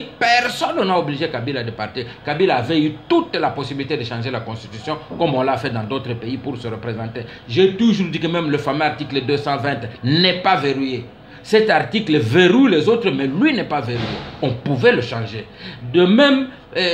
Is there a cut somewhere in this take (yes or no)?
no